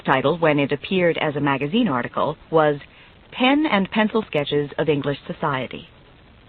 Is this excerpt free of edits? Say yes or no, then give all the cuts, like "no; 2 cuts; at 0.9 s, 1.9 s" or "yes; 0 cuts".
no; 1 cut; at 4.1 s